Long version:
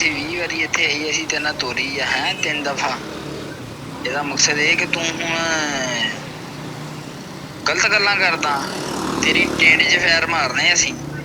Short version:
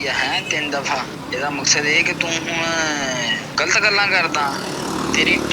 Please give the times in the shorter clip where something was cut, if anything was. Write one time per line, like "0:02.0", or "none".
0:01.1
0:03.5